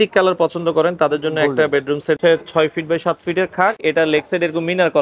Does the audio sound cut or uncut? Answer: cut